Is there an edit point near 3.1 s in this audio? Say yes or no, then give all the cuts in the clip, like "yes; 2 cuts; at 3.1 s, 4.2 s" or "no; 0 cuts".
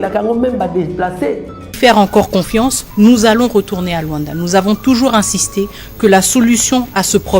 no; 1 cut; at 1.6 s